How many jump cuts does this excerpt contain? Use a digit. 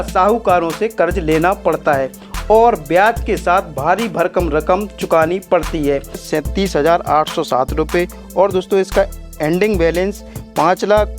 1